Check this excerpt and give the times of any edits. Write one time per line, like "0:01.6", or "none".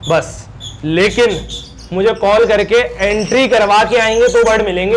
none